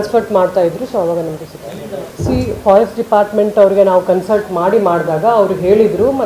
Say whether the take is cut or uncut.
cut